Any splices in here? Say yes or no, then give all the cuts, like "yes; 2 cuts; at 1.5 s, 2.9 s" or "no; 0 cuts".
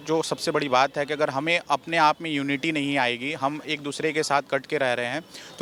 no; 0 cuts